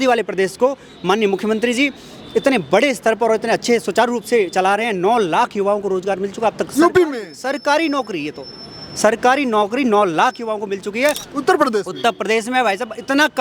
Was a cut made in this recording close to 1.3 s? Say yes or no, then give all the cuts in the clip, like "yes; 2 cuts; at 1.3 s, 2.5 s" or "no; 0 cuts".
no; 1 cut; at 11.2 s